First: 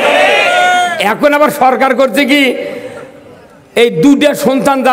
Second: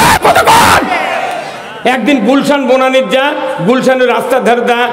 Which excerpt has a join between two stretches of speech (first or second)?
second